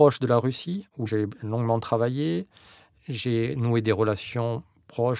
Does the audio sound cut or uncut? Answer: cut